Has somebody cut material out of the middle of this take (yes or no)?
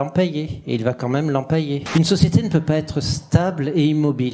yes